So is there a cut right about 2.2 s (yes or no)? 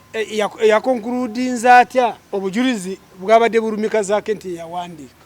yes